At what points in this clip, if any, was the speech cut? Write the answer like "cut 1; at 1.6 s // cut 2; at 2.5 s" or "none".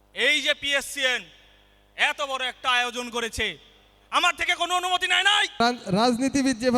cut 1; at 5.6 s